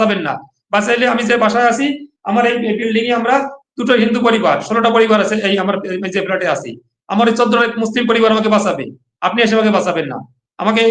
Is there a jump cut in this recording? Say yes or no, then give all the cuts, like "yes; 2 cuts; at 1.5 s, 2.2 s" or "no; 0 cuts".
no; 0 cuts